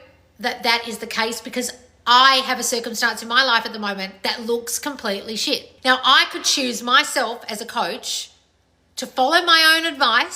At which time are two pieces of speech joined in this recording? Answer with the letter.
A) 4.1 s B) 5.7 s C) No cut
B